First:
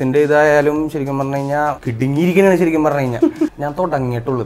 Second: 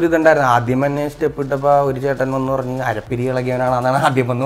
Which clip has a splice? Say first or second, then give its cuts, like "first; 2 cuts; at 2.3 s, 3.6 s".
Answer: first; 2 cuts; at 1.8 s, 3.5 s